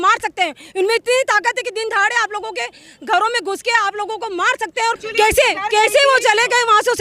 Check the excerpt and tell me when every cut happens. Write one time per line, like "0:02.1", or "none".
0:05.0